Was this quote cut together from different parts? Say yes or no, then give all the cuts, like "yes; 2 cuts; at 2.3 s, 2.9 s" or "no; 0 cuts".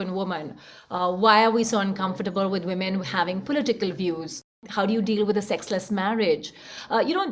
yes; 1 cut; at 4.6 s